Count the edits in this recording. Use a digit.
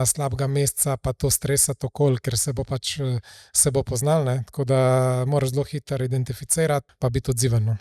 1